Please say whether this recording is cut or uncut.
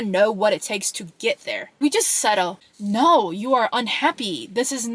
cut